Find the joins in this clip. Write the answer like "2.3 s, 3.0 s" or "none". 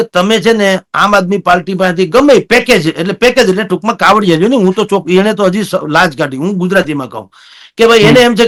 none